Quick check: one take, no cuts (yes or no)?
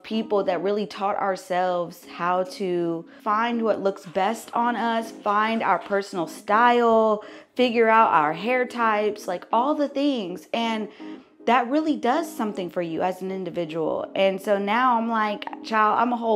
no